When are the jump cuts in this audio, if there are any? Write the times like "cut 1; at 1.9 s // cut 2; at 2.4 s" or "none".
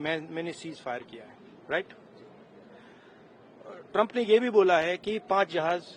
none

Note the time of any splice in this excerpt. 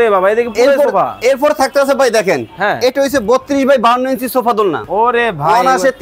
cut 1; at 4.8 s

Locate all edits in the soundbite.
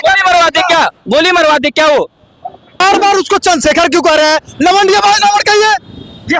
cut 1; at 2.8 s

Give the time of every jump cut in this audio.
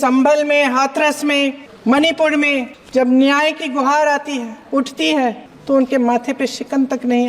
cut 1; at 1.7 s // cut 2; at 2.8 s // cut 3; at 4.6 s // cut 4; at 5.5 s

